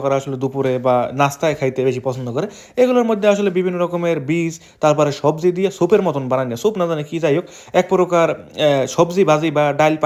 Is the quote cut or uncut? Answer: uncut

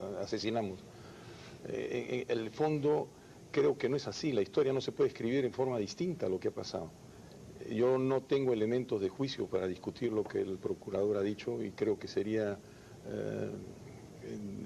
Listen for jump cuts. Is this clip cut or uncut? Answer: uncut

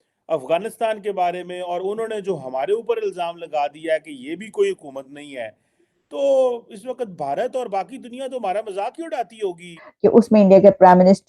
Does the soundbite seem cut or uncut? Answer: cut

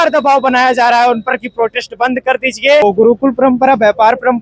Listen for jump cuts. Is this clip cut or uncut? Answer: cut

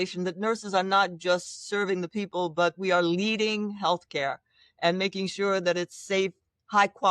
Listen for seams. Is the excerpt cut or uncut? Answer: uncut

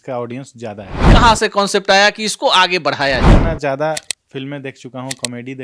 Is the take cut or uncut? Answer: cut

